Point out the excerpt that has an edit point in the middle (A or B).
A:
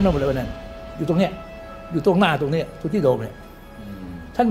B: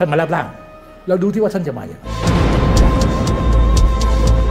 B